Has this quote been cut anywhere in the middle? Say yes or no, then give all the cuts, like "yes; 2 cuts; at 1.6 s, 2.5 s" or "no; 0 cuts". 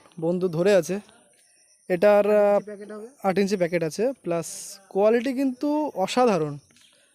no; 0 cuts